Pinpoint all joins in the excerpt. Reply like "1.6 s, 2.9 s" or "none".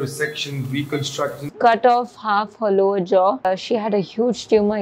1.5 s, 3.4 s